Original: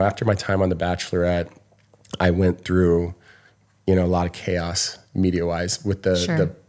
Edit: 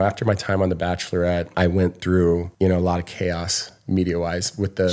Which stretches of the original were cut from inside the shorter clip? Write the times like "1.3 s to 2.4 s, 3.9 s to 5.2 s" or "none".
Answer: 1.5 s to 2.1 s, 3.1 s to 3.8 s